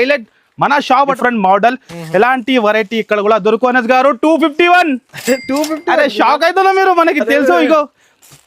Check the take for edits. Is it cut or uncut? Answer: cut